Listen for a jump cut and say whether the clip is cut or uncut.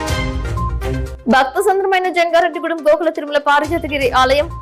uncut